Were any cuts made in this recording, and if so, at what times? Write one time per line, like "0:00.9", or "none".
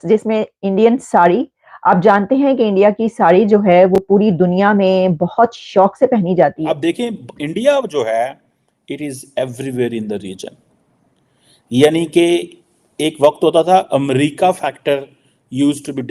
0:06.6